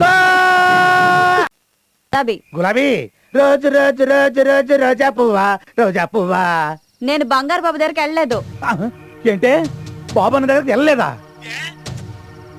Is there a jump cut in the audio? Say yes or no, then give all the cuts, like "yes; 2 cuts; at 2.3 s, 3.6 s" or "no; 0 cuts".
no; 0 cuts